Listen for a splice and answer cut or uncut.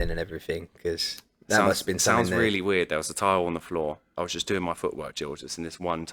cut